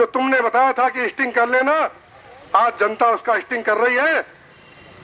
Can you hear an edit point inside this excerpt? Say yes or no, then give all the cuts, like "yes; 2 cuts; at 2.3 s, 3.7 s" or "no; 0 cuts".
no; 0 cuts